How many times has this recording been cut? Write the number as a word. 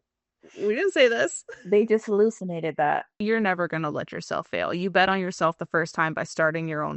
one